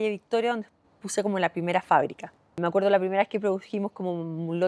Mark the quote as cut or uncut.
cut